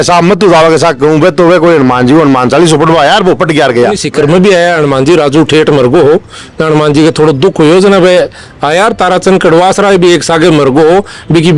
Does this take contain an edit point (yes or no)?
yes